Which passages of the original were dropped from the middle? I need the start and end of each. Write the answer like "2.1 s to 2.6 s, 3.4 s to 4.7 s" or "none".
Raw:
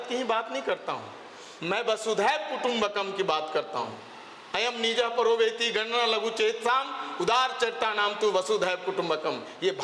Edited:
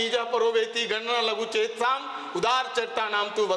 none